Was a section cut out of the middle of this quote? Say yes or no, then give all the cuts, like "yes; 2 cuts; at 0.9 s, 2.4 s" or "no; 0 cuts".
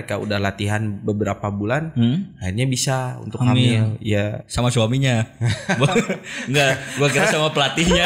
no; 0 cuts